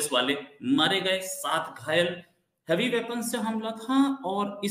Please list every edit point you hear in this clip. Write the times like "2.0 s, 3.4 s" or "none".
none